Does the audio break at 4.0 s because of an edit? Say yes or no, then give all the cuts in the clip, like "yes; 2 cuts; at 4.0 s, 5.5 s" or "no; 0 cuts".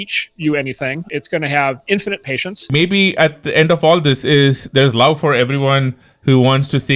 no; 2 cuts; at 1.0 s, 2.7 s